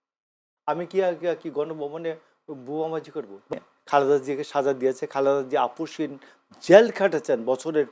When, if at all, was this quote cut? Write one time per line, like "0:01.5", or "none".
0:03.5